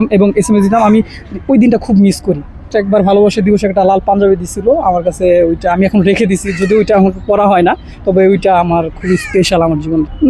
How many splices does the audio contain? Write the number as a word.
zero